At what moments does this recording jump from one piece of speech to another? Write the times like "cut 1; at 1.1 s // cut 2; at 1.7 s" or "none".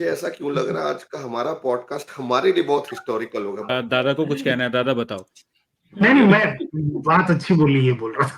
cut 1; at 3.7 s

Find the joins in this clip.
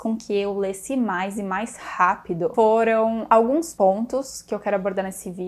cut 1; at 2.5 s // cut 2; at 3.5 s

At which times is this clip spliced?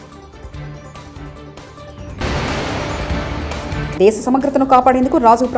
cut 1; at 1.7 s // cut 2; at 3.9 s

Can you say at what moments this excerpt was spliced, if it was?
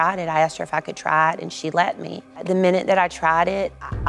none

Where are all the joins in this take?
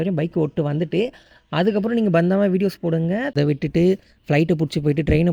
cut 1; at 3.3 s

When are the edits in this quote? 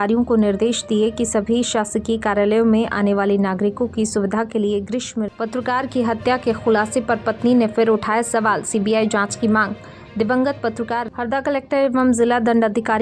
cut 1; at 5.2 s // cut 2; at 11.0 s

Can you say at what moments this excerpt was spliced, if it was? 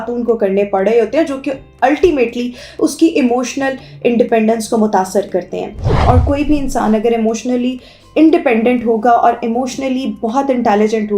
cut 1; at 5.8 s

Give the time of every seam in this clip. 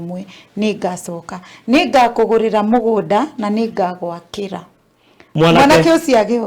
cut 1; at 5.3 s

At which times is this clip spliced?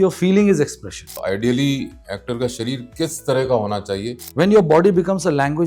cut 1; at 1.2 s // cut 2; at 4.2 s

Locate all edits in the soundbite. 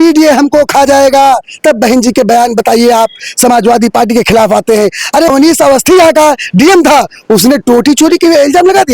cut 1; at 5.3 s

